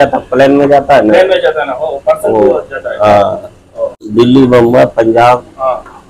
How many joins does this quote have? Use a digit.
1